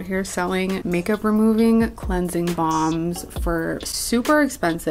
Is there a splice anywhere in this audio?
yes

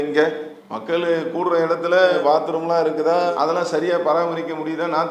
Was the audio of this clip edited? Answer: no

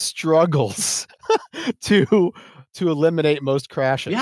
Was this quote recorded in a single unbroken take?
no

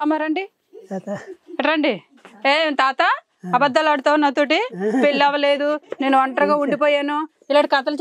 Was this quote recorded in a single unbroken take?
yes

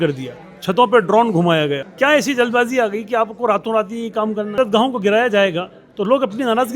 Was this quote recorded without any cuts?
no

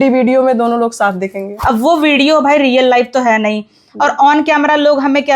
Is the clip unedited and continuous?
no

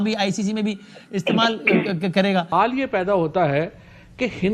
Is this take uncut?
no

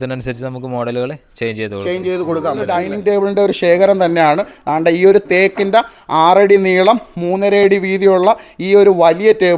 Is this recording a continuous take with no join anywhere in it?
no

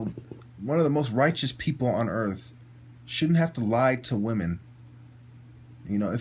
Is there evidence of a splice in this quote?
no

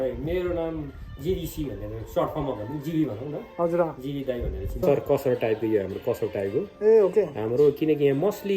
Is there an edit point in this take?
yes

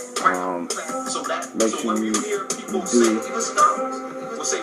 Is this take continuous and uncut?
yes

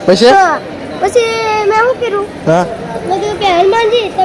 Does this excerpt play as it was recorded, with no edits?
yes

